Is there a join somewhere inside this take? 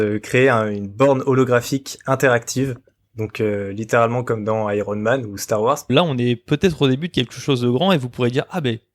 yes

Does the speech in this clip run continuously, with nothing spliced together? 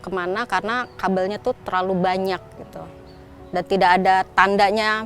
yes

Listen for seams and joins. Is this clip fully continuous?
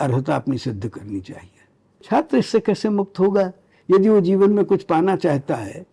no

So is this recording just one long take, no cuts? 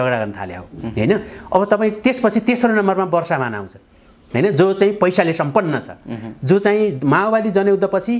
yes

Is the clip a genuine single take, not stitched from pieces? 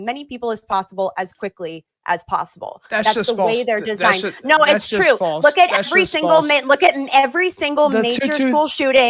yes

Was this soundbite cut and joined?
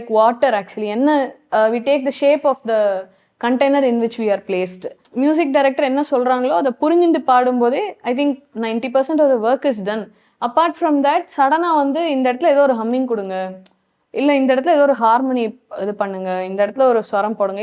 yes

